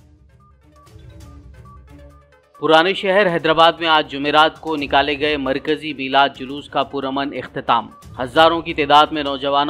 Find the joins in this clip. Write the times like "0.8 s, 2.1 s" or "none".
1.0 s